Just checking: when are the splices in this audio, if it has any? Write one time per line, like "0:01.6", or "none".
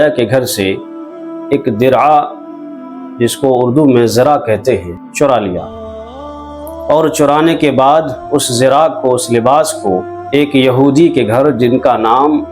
0:05.0
0:10.2